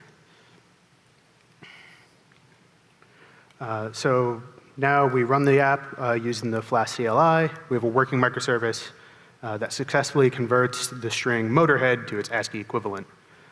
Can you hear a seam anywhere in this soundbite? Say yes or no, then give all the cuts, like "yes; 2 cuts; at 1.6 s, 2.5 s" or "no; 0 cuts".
yes; 1 cut; at 10.2 s